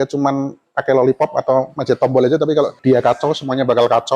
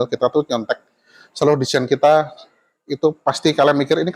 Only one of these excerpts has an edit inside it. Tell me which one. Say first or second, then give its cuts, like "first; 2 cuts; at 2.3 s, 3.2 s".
first; 1 cut; at 2.8 s